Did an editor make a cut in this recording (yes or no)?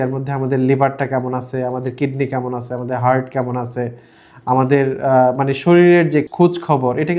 yes